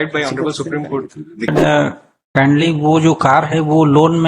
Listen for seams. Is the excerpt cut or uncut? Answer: cut